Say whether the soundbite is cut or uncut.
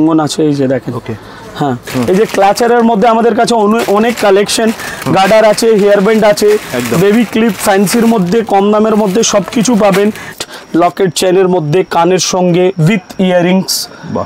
cut